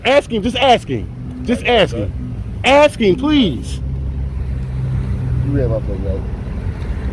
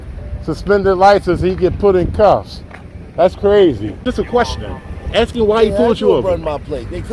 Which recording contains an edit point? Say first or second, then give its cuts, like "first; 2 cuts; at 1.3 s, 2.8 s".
second; 1 cut; at 4.0 s